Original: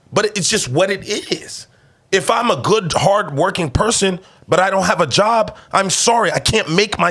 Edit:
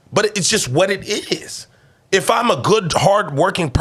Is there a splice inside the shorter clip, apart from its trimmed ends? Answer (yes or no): no